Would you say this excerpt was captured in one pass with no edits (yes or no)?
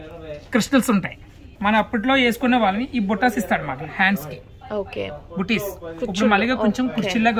no